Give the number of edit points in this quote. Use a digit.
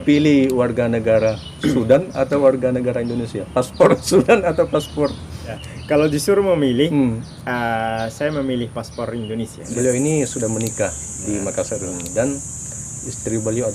2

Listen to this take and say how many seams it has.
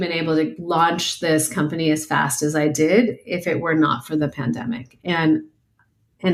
0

